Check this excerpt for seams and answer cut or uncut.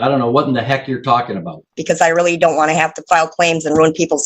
cut